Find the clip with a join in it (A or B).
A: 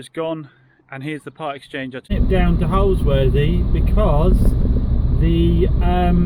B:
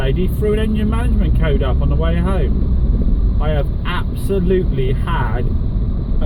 A